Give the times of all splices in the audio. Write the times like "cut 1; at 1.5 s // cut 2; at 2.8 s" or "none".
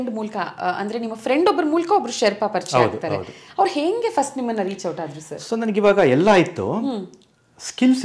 none